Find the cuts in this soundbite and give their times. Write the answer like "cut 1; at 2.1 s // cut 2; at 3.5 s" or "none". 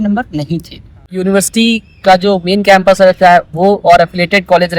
cut 1; at 1.1 s